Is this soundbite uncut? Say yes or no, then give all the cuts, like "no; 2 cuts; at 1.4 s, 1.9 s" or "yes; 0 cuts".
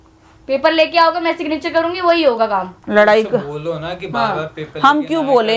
yes; 0 cuts